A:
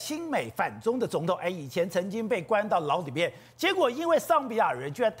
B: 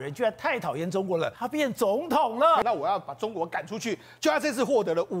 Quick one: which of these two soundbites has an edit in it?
B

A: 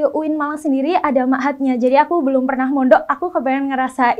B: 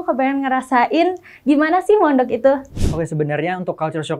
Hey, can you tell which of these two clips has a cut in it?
B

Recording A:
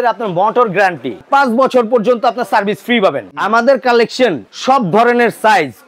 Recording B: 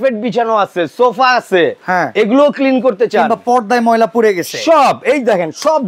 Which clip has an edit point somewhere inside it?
A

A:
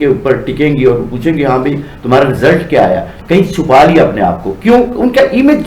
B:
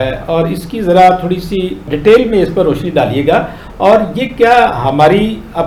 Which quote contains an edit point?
A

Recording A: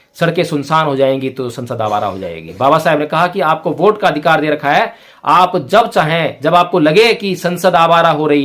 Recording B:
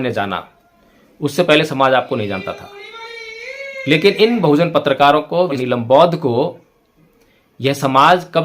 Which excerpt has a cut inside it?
B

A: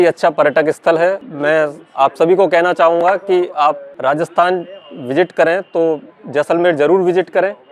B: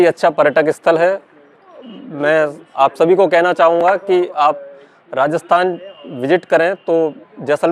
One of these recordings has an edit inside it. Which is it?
A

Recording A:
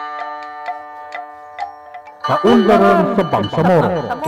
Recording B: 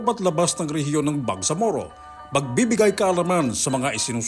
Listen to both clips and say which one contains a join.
A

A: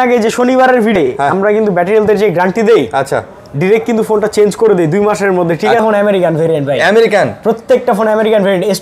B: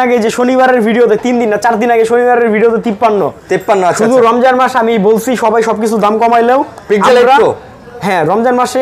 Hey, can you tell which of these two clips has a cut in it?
A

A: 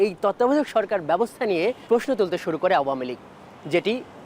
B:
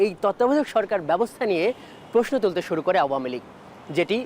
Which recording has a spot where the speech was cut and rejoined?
A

